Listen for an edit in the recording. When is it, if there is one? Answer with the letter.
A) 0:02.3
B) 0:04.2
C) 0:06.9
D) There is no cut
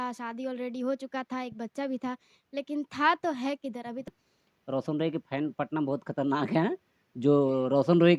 B